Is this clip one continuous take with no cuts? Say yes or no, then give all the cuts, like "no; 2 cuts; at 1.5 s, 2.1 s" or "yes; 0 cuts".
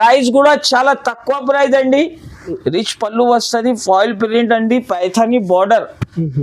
no; 1 cut; at 2.5 s